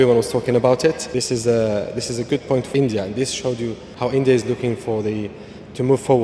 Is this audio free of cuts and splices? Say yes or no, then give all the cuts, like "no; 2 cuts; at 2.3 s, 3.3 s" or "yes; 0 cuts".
no; 3 cuts; at 1.0 s, 2.7 s, 3.8 s